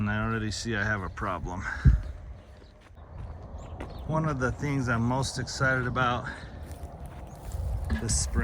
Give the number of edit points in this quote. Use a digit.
1